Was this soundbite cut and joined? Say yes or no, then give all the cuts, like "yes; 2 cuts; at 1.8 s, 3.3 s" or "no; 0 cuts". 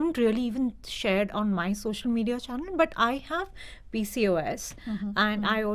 no; 0 cuts